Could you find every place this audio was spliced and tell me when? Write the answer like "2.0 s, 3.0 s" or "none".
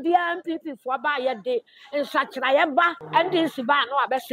3.0 s